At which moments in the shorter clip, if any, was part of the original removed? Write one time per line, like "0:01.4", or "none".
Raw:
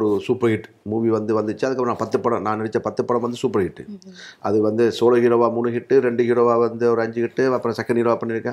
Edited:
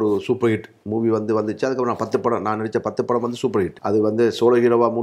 0:03.8

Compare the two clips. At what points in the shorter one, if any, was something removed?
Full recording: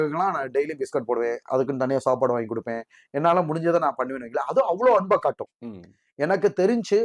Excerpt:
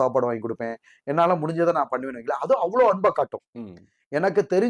none

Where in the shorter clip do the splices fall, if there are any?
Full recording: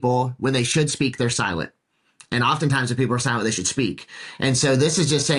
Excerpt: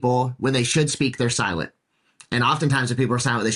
none

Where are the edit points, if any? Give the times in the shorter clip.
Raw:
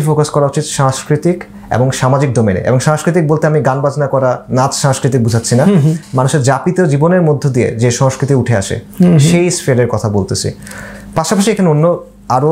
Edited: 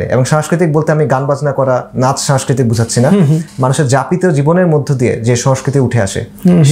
none

